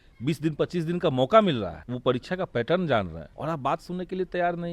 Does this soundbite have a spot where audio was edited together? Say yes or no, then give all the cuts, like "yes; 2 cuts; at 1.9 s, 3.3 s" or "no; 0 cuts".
yes; 2 cuts; at 1.8 s, 3.2 s